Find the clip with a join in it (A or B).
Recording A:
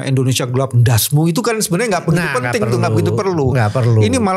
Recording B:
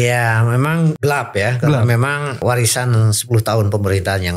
B